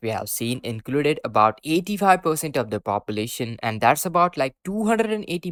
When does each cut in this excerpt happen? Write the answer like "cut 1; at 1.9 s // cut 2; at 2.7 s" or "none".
none